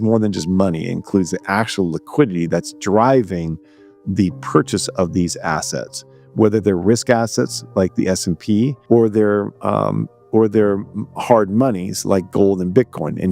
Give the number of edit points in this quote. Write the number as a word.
one